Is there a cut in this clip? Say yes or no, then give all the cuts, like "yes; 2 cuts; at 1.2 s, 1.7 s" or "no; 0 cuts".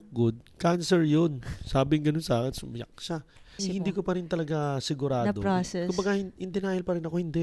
yes; 1 cut; at 3.6 s